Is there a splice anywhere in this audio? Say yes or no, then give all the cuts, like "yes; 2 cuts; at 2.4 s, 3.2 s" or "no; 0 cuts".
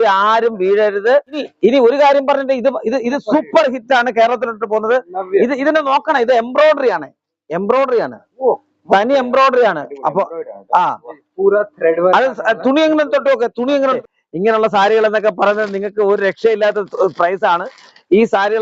yes; 2 cuts; at 1.5 s, 14.0 s